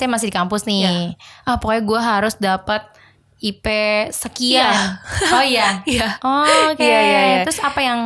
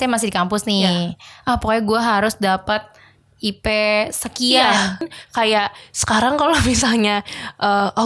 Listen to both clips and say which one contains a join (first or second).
second